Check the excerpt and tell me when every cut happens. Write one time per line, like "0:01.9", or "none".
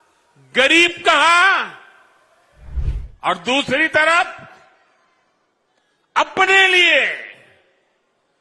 0:02.8